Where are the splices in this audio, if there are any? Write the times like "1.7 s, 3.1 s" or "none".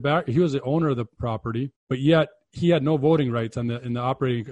1.8 s